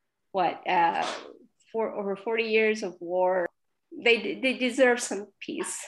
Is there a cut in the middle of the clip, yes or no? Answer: yes